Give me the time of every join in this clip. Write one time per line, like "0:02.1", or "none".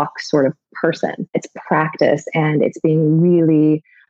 0:01.3